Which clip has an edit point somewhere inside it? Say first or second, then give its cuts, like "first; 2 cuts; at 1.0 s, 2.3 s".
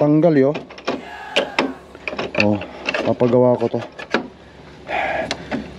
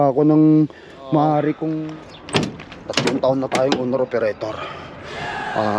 second; 1 cut; at 1.8 s